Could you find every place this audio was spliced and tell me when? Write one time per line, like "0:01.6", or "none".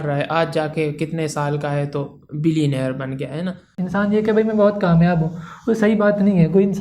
0:03.8